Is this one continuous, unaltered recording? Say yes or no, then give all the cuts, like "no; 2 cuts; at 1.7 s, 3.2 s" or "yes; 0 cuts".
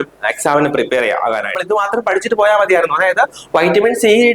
no; 1 cut; at 1.6 s